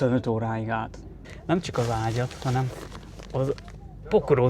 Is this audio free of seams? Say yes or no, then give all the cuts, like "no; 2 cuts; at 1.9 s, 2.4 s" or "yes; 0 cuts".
no; 1 cut; at 1.2 s